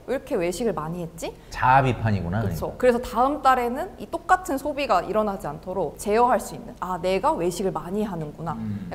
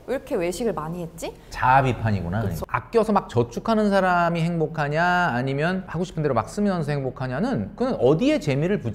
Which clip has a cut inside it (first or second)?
second